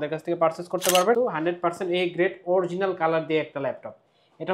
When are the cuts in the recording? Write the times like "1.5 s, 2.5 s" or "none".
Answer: 1.2 s